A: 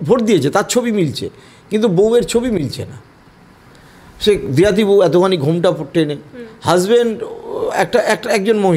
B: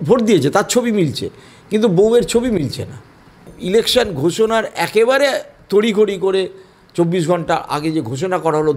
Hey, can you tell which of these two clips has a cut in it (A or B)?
B